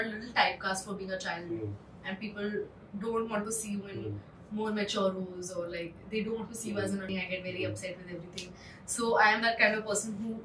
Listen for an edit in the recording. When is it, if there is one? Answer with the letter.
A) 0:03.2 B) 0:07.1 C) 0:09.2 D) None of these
B